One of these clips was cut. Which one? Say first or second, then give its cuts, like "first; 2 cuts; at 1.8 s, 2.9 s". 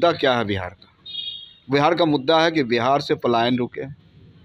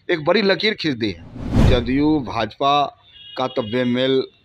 second; 1 cut; at 1.5 s